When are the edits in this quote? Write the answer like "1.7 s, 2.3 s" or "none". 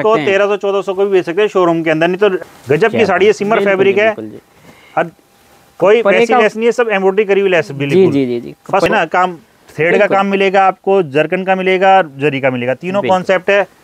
2.4 s, 8.9 s